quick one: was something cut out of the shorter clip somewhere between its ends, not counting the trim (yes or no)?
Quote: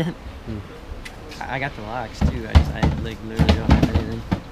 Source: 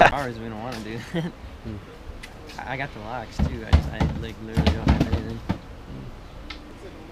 no